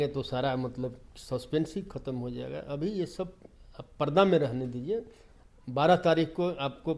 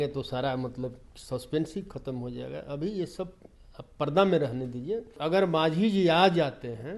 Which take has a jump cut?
second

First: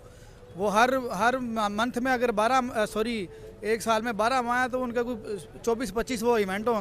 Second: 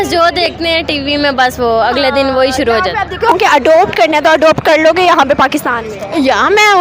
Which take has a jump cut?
second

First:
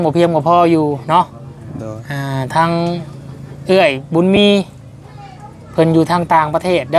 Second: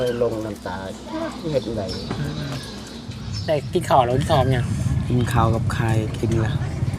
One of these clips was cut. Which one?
second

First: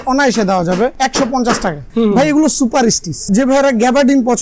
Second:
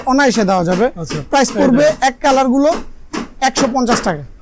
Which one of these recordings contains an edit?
first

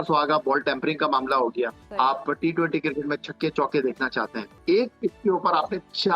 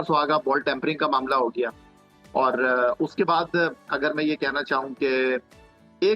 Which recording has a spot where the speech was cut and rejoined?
first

